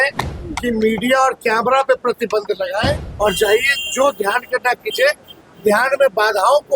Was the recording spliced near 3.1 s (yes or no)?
yes